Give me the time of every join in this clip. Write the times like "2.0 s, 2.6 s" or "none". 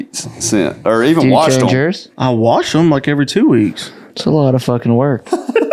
none